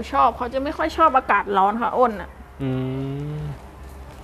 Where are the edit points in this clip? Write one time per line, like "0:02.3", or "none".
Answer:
none